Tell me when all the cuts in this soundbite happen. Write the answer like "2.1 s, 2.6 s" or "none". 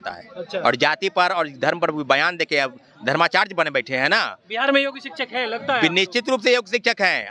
none